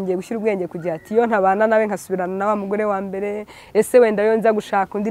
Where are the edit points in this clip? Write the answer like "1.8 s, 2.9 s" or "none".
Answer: none

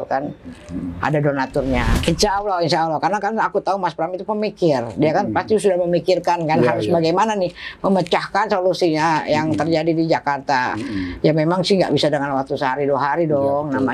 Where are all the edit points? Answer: 1.9 s

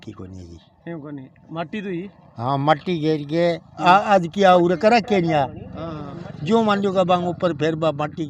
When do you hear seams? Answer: none

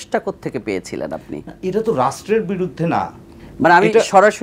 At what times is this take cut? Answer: none

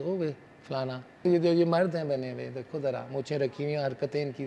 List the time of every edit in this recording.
1.2 s

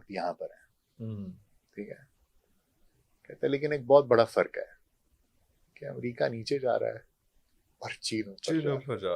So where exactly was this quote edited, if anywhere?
none

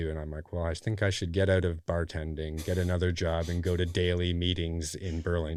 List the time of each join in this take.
none

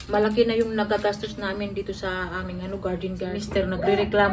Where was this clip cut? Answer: 3.3 s

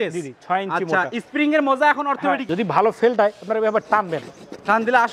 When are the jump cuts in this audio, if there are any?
2.5 s

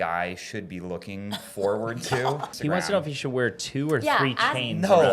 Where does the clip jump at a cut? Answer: 2.5 s

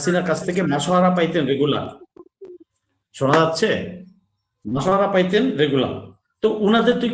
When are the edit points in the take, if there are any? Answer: none

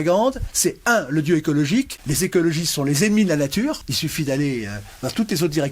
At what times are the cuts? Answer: 2.0 s, 3.9 s

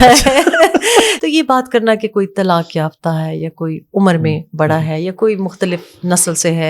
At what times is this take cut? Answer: 1.1 s

